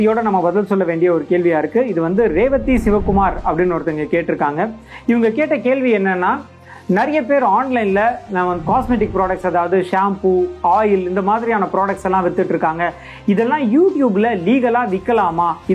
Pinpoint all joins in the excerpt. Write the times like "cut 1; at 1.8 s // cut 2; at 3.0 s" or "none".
none